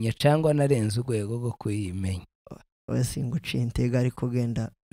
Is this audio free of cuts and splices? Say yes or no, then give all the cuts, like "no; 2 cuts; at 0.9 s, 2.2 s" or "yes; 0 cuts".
yes; 0 cuts